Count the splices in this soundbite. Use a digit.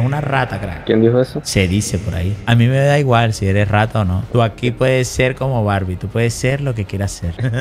0